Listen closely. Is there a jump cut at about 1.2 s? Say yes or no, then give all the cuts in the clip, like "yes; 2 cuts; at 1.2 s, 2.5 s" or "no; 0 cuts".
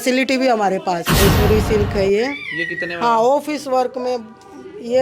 yes; 1 cut; at 1.2 s